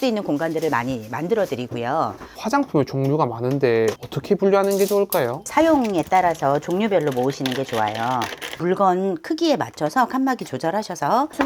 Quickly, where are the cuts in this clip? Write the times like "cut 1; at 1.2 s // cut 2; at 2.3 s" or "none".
cut 1; at 2.3 s